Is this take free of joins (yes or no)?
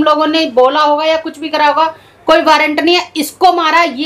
yes